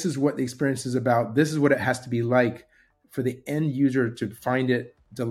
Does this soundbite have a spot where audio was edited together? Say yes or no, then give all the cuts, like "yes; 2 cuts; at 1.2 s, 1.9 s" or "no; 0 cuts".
no; 0 cuts